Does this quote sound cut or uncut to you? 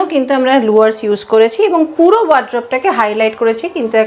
uncut